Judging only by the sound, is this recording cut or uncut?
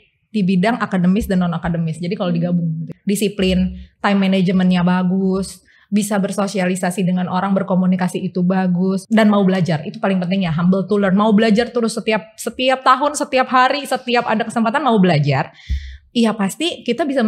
cut